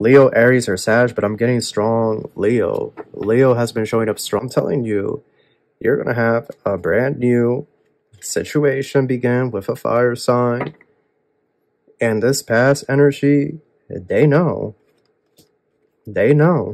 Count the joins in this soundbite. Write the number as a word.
one